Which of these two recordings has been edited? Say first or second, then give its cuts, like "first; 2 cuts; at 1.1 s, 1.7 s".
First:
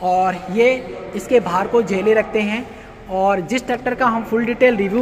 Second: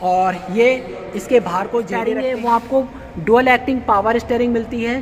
second; 1 cut; at 2.1 s